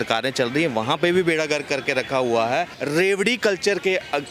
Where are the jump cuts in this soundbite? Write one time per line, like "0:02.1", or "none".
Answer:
0:02.8